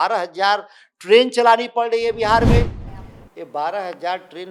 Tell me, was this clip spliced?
yes; 1 cut; at 2.8 s

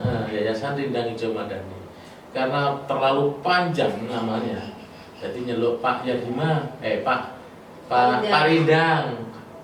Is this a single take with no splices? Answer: yes; 0 cuts

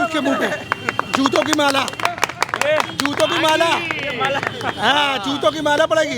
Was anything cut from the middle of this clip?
no; 0 cuts

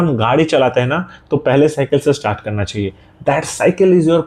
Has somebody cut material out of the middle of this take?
no; 0 cuts

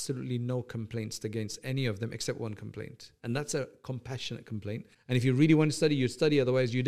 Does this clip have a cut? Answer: yes; 1 cut; at 4.9 s

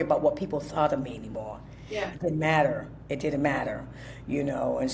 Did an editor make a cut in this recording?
no; 0 cuts

